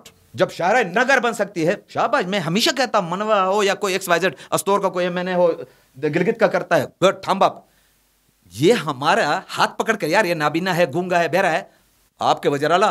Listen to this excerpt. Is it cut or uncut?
uncut